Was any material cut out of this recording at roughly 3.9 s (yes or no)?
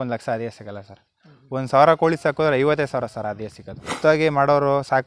yes